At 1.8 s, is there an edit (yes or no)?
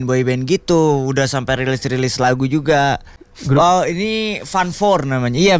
no